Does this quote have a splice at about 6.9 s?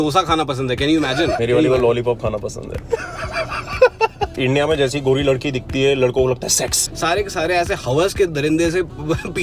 yes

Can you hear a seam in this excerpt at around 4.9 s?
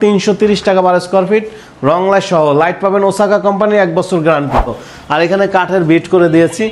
yes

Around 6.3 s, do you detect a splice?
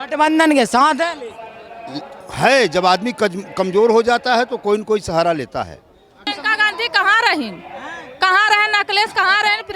yes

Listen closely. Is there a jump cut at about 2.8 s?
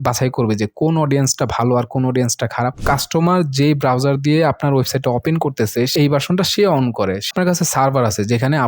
yes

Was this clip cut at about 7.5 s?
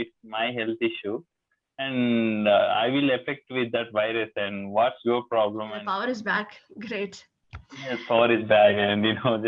no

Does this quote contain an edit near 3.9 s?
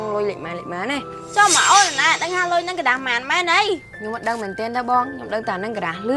yes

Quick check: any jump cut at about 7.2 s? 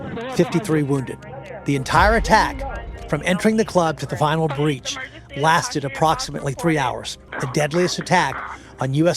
yes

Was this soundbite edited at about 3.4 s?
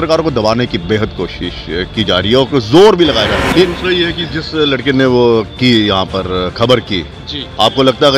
yes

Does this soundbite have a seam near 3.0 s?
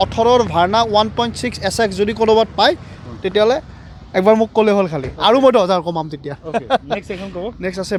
no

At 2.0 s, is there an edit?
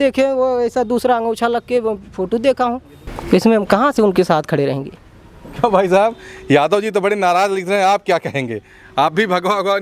no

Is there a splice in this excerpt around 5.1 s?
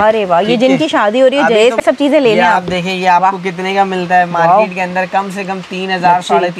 no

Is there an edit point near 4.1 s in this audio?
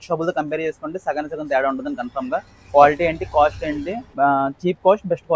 yes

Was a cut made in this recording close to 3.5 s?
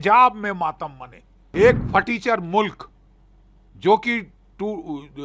no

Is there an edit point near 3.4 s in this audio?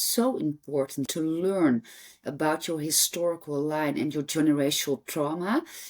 no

